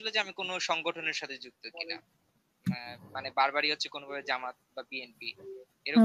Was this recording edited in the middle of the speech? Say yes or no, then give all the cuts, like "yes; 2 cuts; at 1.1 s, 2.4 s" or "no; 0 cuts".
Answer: no; 0 cuts